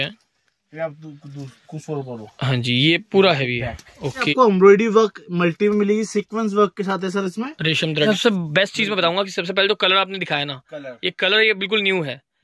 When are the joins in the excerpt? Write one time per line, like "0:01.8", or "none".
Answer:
0:04.3
0:08.1